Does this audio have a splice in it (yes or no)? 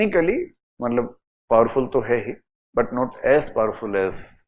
no